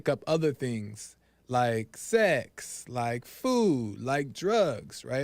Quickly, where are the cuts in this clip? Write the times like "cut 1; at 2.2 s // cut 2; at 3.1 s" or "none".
none